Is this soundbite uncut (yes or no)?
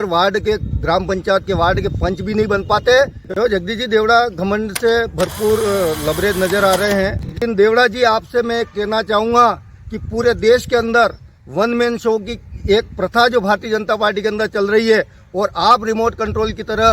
no